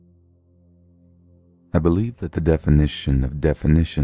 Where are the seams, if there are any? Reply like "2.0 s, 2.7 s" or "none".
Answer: 1.7 s